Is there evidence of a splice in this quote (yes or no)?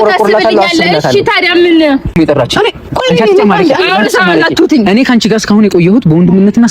yes